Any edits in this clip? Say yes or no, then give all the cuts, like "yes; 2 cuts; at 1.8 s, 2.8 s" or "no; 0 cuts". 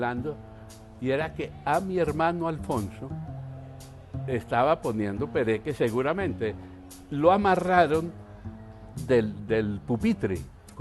no; 0 cuts